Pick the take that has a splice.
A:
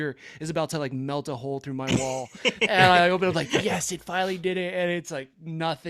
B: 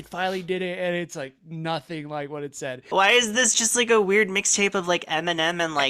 B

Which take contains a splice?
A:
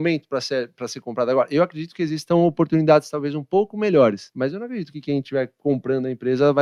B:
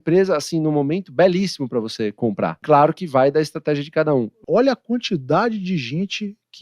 B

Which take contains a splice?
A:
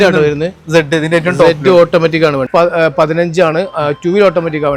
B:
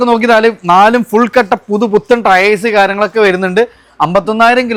A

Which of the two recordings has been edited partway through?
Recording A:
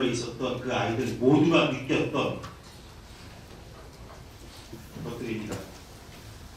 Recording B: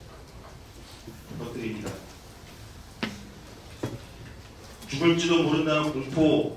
B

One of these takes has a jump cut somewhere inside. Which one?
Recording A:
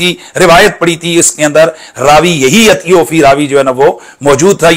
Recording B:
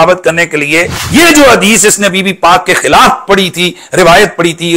B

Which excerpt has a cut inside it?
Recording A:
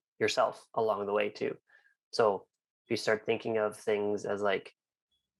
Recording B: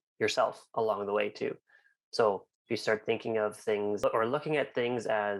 B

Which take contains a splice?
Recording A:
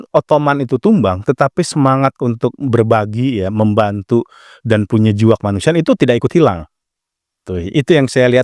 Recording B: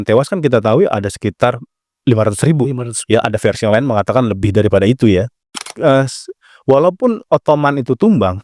B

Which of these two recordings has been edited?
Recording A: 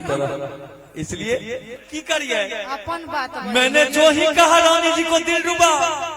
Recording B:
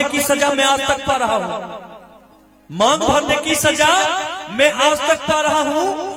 A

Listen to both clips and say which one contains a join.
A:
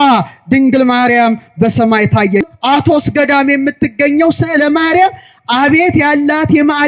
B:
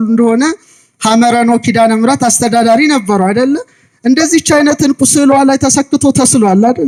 A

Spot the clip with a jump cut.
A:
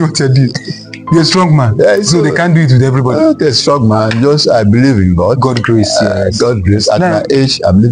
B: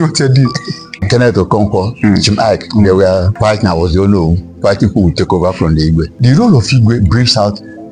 B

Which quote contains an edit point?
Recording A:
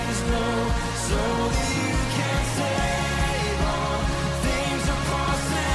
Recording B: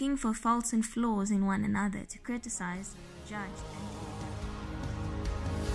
B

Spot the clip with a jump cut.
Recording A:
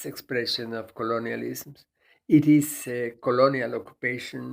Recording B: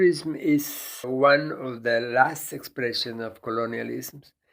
B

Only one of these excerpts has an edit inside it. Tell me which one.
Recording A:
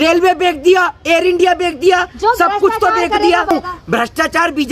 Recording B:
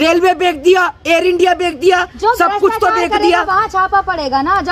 A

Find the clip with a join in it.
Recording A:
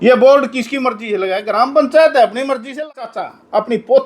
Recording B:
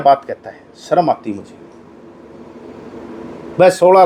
A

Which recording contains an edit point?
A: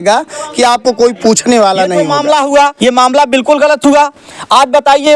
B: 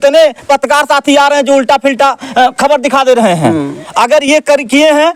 A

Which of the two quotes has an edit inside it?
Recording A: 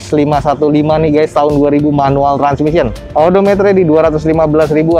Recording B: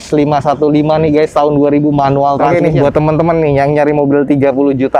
B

